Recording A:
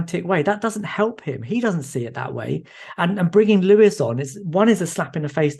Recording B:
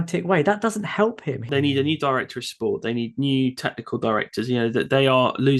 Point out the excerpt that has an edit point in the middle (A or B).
B